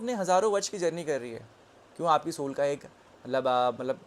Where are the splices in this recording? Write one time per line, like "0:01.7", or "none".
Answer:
none